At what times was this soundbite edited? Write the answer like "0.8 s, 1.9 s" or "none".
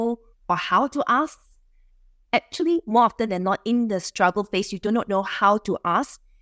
none